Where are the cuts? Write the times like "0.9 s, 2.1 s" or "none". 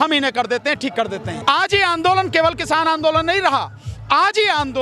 1.3 s